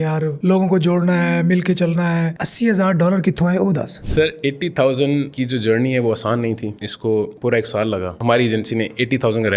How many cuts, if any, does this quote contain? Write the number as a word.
one